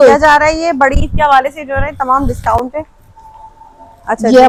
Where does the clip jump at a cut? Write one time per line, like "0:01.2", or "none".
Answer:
none